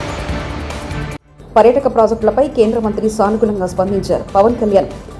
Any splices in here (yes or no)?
no